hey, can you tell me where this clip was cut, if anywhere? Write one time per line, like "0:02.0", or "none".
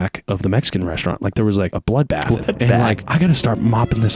0:02.1
0:03.0